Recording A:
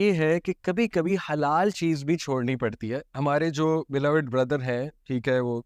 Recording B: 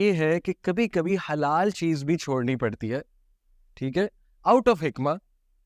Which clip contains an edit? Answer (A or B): A